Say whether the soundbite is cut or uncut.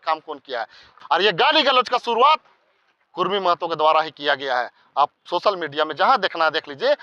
cut